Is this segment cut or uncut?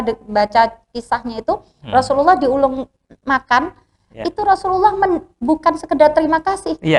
uncut